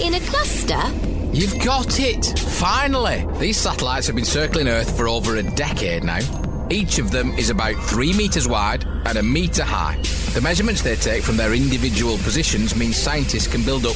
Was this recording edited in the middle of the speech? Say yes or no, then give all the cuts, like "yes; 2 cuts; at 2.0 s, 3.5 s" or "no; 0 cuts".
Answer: no; 0 cuts